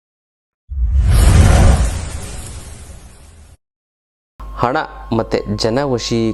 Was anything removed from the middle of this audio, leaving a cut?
yes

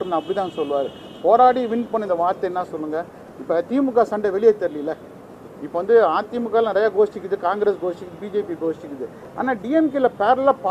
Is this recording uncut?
yes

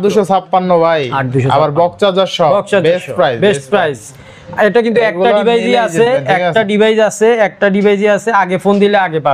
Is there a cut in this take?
no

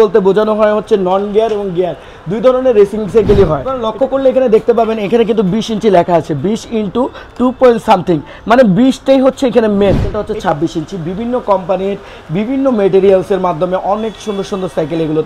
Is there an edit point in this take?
yes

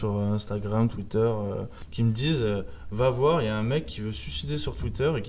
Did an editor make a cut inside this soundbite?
yes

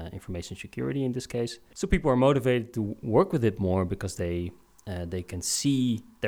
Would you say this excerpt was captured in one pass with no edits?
no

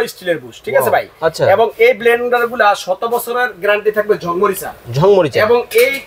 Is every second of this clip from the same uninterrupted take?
yes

